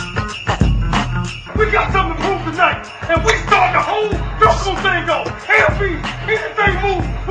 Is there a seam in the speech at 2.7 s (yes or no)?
no